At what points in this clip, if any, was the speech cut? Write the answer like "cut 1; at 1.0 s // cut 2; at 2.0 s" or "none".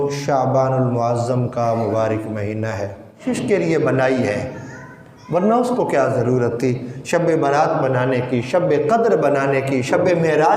cut 1; at 3.2 s